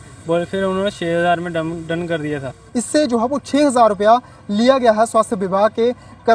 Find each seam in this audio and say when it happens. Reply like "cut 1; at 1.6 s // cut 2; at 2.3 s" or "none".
cut 1; at 2.5 s